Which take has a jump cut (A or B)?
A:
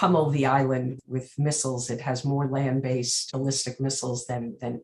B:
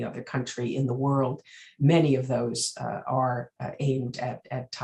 A